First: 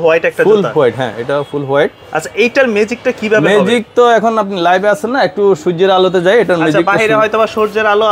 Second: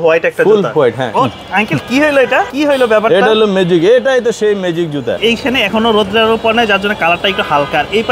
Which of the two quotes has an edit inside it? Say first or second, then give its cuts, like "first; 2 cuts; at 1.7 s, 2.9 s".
second; 3 cuts; at 1.1 s, 2.5 s, 5.2 s